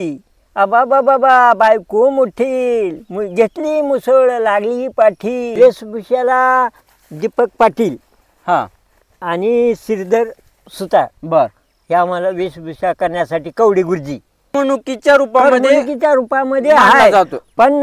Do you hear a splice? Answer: yes; 2 cuts; at 5.5 s, 14.5 s

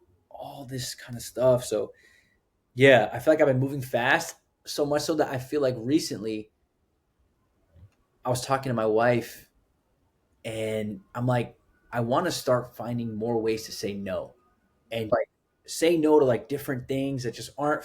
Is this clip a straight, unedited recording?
no; 1 cut; at 15.1 s

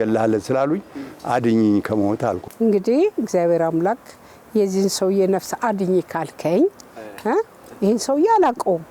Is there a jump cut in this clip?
yes; 1 cut; at 2.4 s

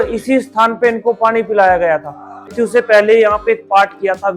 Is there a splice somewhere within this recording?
yes; 1 cut; at 2.3 s

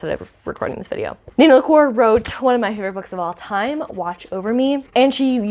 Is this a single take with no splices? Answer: yes; 0 cuts

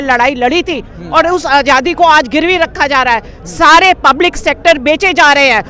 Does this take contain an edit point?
no; 0 cuts

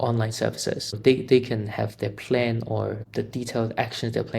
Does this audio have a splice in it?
yes; 2 cuts; at 1.0 s, 3.0 s

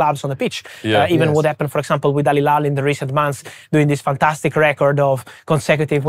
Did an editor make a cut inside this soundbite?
no; 0 cuts

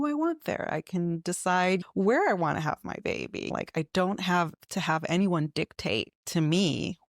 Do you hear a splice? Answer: yes; 2 cuts; at 1.8 s, 3.5 s

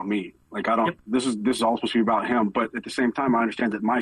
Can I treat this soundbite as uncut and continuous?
yes; 0 cuts

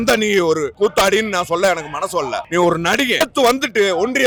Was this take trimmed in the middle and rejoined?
no; 0 cuts

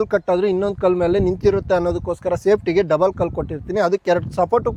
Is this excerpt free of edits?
yes; 0 cuts

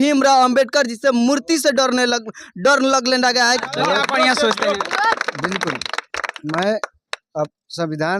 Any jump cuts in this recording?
yes; 1 cut; at 3.6 s

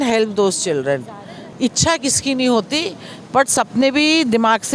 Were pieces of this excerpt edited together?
yes; 1 cut; at 1.4 s

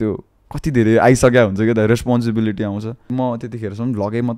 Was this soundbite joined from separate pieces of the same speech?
yes; 1 cut; at 3.1 s

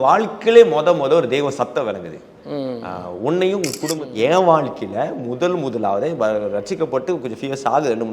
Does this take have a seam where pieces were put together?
yes; 1 cut; at 4.1 s

